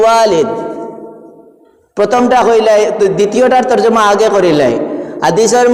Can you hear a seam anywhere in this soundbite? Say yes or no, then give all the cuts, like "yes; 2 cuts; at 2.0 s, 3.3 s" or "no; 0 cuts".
no; 0 cuts